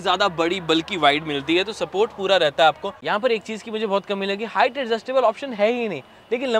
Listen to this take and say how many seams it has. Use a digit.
1